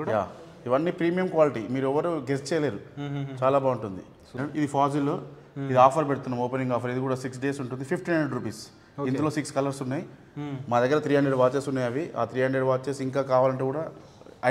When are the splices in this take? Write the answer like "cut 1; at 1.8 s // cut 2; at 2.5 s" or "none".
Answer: cut 1; at 4.4 s